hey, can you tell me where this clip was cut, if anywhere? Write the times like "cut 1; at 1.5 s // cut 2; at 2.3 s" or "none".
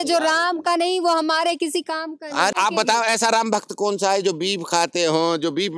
cut 1; at 2.5 s